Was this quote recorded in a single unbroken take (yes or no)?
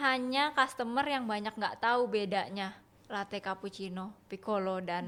yes